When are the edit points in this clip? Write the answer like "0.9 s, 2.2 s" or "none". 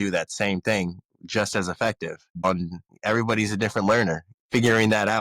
2.5 s, 4.4 s